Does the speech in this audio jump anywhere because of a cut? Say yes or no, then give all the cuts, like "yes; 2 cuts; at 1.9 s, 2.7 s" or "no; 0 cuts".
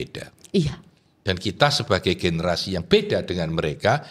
no; 0 cuts